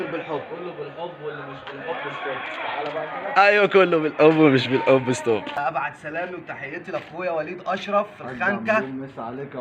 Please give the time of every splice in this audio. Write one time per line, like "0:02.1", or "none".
0:05.6